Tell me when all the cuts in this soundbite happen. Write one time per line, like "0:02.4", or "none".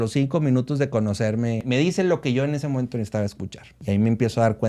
0:01.6
0:03.8

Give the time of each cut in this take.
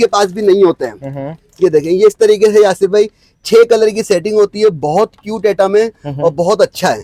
none

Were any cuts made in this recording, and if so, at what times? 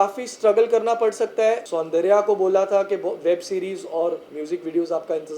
0:01.6
0:04.3

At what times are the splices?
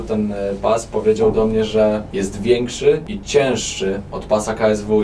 0:02.1
0:03.1

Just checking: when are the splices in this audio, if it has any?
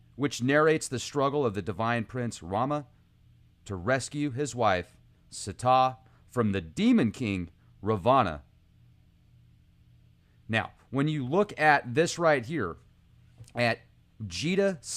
0:12.3

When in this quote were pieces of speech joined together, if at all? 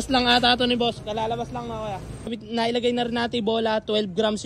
0:02.4

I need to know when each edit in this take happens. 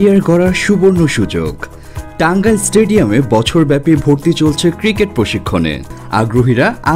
0:05.9

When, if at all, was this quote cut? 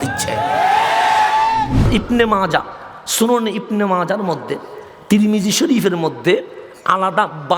0:01.9

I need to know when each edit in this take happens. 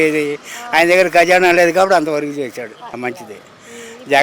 0:02.9

